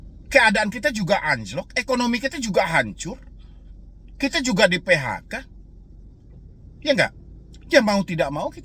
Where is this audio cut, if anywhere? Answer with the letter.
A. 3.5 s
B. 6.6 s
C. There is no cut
C